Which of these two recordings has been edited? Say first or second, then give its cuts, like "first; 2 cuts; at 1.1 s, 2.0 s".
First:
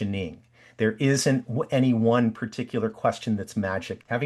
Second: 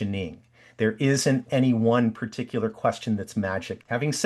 second; 1 cut; at 1.5 s